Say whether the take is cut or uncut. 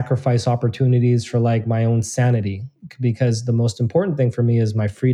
uncut